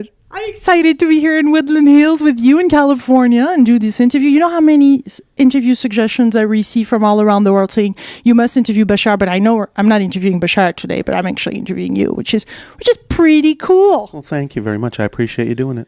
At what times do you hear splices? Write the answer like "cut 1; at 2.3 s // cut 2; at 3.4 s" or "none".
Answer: none